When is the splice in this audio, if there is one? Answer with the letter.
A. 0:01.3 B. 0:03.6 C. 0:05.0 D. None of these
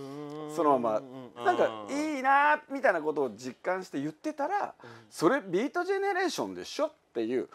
A